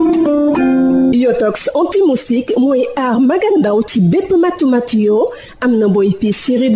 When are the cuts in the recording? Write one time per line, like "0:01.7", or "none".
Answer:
0:01.1